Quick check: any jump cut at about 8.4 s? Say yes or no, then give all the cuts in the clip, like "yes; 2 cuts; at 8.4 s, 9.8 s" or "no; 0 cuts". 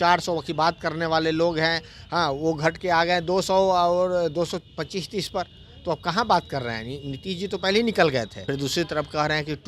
yes; 1 cut; at 8.4 s